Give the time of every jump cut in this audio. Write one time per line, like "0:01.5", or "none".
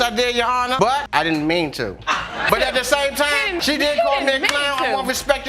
0:02.5